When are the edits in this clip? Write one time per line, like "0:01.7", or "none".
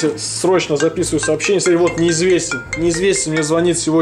none